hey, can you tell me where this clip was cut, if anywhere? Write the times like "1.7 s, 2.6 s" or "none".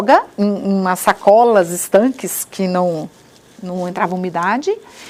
none